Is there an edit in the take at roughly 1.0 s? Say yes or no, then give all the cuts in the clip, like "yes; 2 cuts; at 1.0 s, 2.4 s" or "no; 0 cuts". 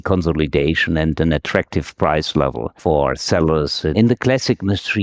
no; 1 cut; at 3.9 s